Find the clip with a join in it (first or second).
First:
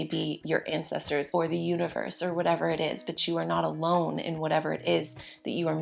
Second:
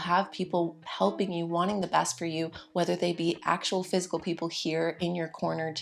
first